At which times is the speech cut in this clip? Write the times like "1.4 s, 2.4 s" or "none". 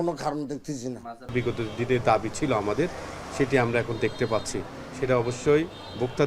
1.3 s